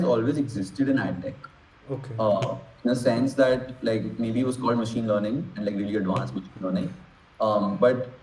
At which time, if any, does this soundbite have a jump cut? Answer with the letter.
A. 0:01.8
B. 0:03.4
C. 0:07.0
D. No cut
D